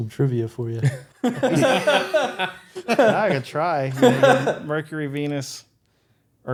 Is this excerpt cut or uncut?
uncut